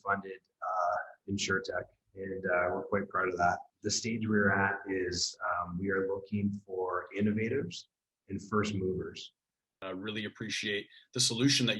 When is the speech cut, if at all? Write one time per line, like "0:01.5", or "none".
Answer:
0:03.7
0:09.7